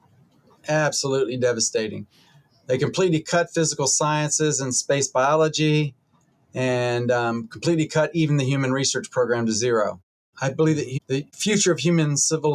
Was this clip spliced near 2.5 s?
no; 2 cuts; at 10.3 s, 11.3 s

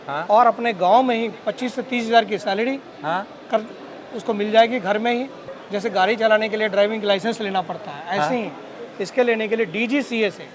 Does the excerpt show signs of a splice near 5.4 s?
yes; 1 cut; at 5.4 s

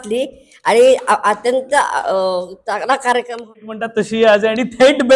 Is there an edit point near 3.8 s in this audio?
yes; 1 cut; at 3.8 s

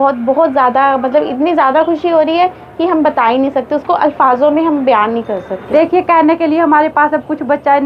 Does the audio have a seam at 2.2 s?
no; 1 cut; at 5.5 s

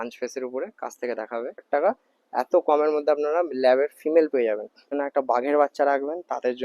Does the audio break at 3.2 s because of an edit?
no; 2 cuts; at 1.7 s, 4.9 s

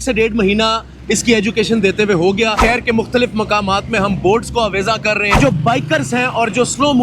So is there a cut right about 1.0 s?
no; 2 cuts; at 2.6 s, 5.4 s

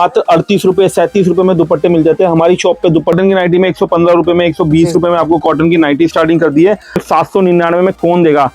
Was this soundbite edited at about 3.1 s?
yes; 2 cuts; at 3.1 s, 7.0 s

